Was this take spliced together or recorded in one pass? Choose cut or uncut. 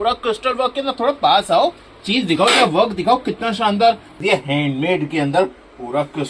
cut